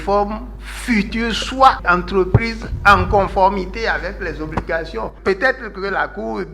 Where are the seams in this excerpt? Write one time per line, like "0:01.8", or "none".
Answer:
0:01.1
0:01.8